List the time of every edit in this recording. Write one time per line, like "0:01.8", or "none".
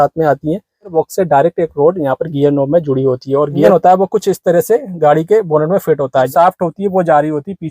0:00.9
0:03.7
0:06.3